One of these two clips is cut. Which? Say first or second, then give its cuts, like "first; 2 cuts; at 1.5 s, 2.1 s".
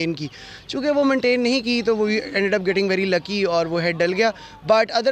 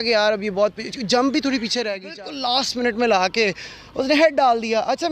second; 1 cut; at 2.1 s